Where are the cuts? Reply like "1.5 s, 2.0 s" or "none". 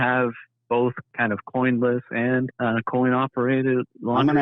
1.1 s, 2.5 s